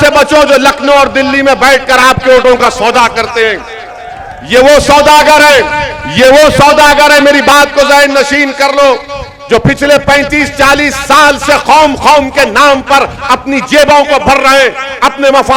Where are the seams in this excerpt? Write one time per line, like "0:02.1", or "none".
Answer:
none

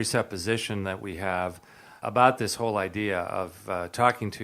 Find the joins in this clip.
0:02.0

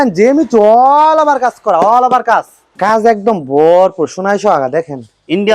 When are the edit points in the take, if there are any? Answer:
0:02.6

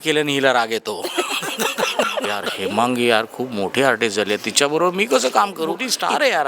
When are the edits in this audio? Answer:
0:02.5
0:05.5

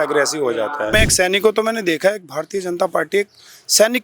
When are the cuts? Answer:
0:00.9

